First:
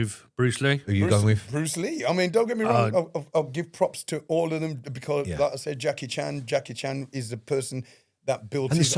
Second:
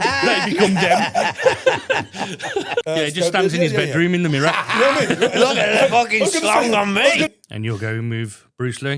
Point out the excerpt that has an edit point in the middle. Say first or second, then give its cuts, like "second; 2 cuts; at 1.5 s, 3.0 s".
second; 2 cuts; at 2.8 s, 7.3 s